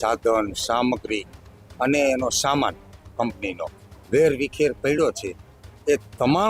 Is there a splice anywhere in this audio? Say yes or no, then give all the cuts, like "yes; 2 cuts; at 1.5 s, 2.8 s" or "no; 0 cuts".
no; 0 cuts